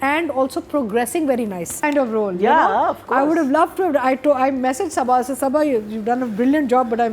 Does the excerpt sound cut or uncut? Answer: cut